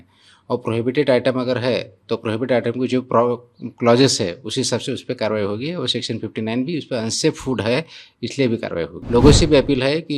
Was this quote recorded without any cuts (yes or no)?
no